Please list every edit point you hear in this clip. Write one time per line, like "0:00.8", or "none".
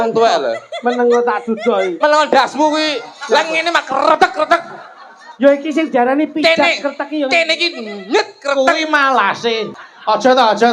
0:09.7

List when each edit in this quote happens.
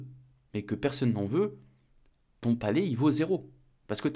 none

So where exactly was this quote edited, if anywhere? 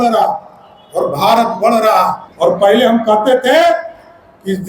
0:02.2

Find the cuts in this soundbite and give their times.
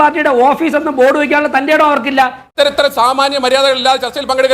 0:02.4

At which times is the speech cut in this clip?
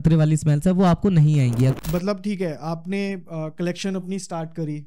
0:01.7

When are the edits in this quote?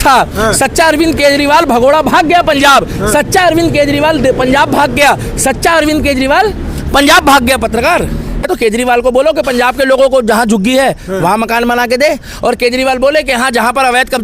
0:08.4

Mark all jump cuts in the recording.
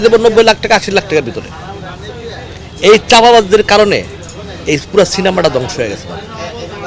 none

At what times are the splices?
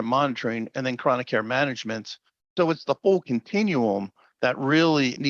none

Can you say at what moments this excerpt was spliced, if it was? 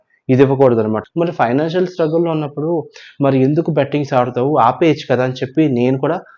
0:01.0

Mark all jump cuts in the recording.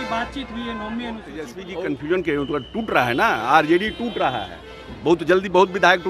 0:01.6

